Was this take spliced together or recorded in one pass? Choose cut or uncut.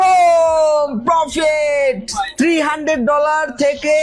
uncut